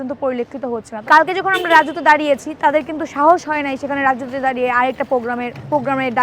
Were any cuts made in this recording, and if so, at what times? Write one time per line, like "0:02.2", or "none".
0:00.9